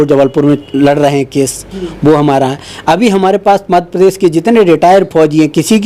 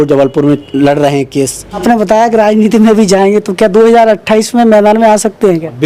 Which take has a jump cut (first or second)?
second